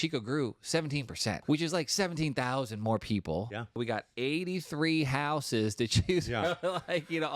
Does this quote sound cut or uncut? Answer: cut